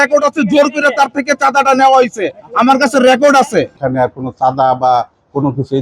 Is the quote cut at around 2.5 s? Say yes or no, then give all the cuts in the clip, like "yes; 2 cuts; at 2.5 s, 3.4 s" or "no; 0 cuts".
no; 1 cut; at 3.8 s